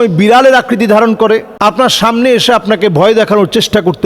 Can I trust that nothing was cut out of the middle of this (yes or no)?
no